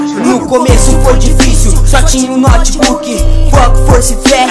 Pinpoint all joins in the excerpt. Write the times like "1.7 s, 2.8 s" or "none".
none